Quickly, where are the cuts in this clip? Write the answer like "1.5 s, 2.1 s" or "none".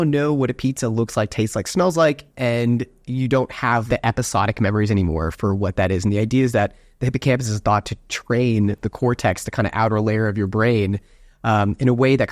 2.3 s, 3.8 s